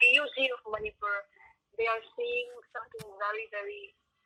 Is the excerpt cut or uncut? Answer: uncut